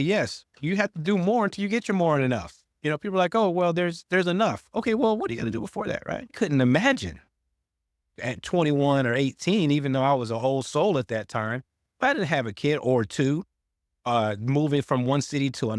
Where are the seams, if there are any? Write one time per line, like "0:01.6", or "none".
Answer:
0:06.3